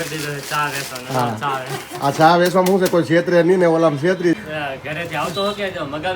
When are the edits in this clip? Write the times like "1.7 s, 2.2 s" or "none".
4.4 s